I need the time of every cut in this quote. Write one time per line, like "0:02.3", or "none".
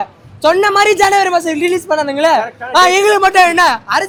none